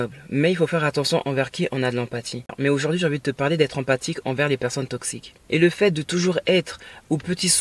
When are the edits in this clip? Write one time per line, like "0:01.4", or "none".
0:02.4
0:05.3